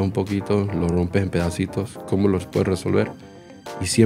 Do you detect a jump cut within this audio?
no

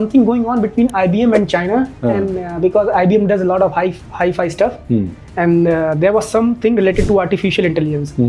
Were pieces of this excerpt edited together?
no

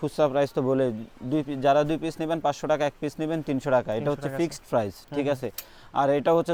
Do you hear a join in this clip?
no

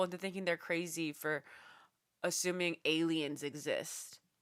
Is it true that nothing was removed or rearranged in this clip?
yes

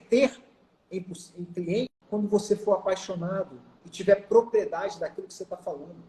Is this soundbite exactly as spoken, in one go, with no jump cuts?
no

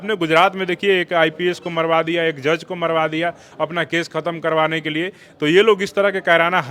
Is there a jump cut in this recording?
no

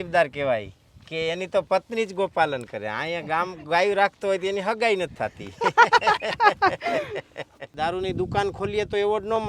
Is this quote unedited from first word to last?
no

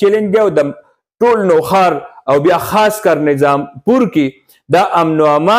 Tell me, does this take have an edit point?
no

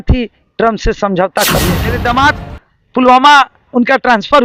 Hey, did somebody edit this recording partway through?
yes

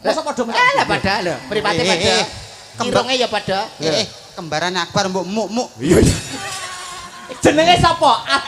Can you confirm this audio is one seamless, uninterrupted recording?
yes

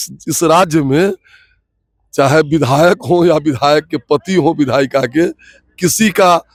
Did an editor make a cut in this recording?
no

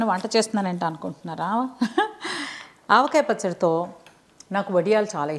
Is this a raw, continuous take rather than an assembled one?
yes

